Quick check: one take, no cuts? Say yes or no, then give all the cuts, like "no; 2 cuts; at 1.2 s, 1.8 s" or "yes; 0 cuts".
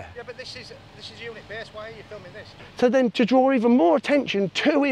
no; 1 cut; at 2.7 s